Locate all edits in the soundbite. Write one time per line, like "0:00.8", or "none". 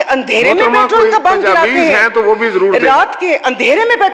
none